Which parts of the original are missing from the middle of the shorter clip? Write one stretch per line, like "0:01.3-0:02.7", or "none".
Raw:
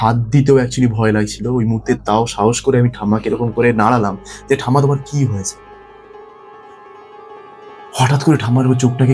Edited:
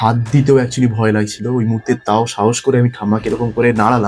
none

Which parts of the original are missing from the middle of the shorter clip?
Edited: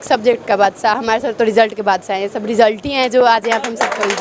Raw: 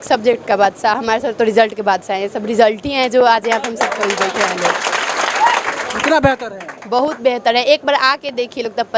none

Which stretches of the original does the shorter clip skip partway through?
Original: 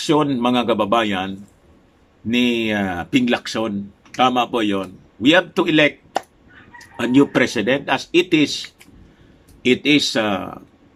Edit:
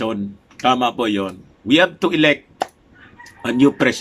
none

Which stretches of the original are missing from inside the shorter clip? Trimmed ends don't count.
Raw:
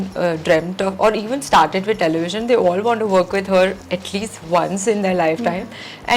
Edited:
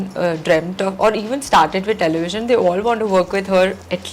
none

